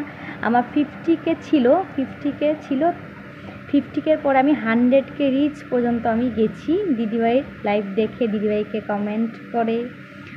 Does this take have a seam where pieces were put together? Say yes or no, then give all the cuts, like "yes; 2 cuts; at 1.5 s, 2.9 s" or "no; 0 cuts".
no; 0 cuts